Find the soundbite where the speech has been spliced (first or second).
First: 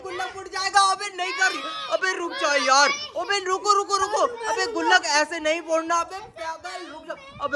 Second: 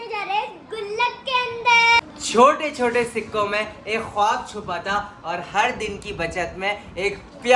second